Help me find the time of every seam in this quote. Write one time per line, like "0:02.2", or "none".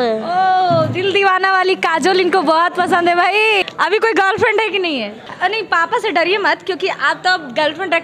0:03.6
0:05.2